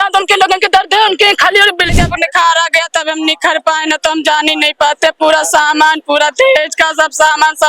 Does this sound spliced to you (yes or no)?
yes